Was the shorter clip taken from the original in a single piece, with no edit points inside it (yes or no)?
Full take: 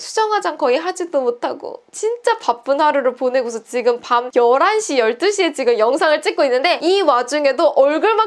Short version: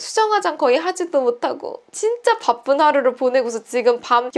yes